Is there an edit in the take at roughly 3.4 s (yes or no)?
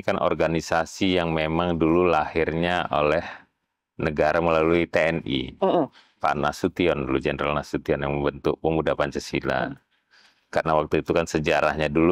no